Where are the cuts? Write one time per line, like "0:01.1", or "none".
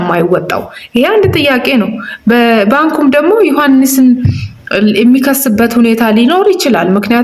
none